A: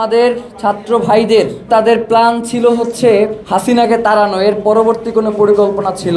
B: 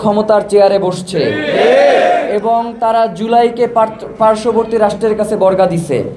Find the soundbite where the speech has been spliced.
A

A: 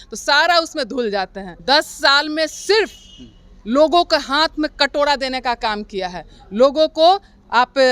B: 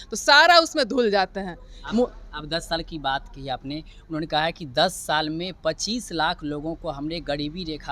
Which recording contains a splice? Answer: A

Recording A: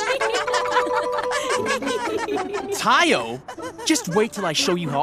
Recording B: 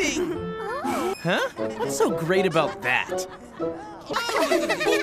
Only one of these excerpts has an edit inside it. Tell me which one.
B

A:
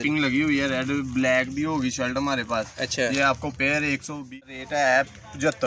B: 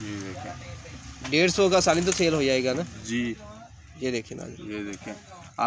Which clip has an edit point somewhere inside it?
A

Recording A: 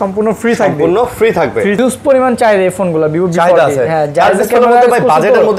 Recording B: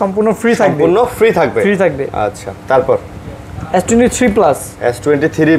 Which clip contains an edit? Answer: A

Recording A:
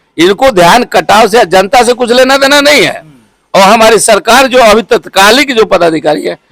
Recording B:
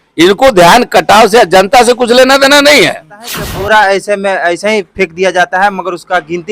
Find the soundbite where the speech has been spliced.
B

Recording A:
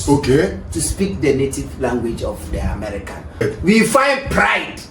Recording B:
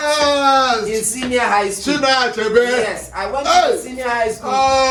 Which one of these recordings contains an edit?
A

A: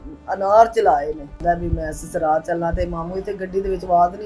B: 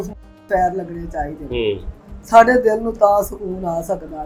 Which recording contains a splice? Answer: A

